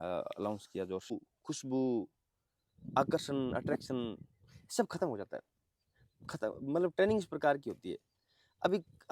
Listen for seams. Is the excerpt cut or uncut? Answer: cut